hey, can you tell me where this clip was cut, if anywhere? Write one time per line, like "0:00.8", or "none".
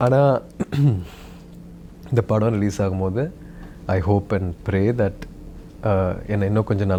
none